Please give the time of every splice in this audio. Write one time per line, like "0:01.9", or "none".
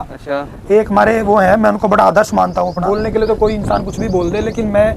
0:02.8

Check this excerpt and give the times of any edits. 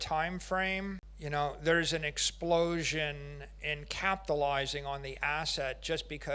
0:01.1

